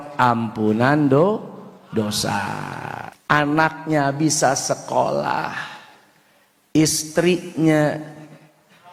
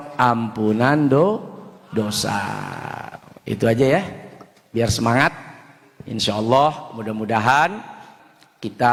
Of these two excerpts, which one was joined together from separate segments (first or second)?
first